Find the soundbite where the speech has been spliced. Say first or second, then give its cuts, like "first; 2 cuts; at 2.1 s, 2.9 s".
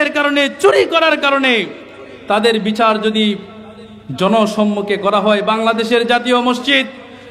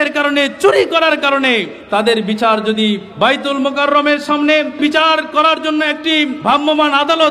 second; 4 cuts; at 1.8 s, 3.1 s, 4.8 s, 6.4 s